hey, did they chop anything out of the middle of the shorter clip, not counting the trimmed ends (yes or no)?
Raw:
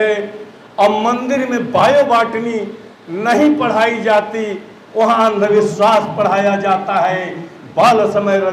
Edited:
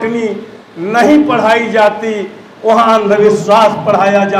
no